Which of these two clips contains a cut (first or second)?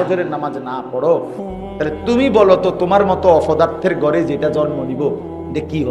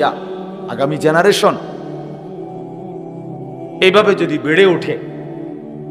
second